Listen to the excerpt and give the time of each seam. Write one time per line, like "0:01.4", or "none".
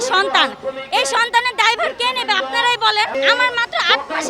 0:03.1